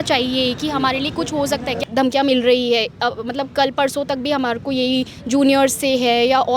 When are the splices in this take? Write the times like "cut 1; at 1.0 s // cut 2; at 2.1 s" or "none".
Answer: cut 1; at 1.8 s